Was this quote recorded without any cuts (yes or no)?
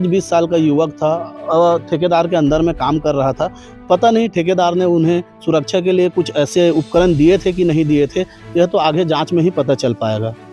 yes